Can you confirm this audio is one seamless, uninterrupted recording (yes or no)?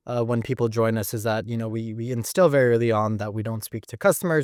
yes